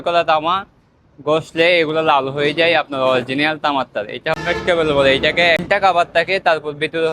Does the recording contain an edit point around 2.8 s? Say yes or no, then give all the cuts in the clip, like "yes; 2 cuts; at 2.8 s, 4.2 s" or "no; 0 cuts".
no; 2 cuts; at 4.3 s, 5.6 s